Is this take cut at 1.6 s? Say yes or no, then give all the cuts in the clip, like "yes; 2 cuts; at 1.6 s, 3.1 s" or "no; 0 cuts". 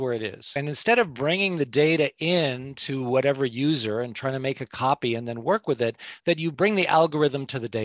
no; 1 cut; at 6.6 s